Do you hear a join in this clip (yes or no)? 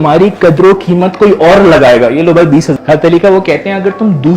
yes